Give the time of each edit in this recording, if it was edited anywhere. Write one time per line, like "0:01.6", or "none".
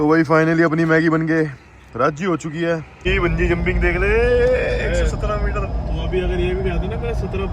0:02.9